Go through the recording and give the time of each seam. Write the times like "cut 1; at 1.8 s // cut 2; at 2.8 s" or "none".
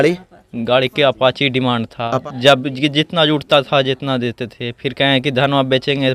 cut 1; at 2.2 s